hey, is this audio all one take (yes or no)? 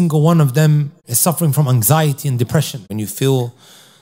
no